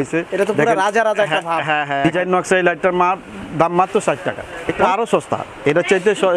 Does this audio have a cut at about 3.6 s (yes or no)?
no